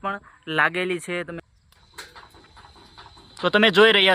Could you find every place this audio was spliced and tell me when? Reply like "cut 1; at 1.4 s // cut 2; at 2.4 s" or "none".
cut 1; at 1.4 s